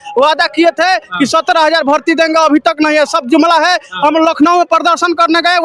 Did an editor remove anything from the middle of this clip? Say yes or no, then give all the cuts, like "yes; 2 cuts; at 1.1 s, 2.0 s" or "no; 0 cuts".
no; 0 cuts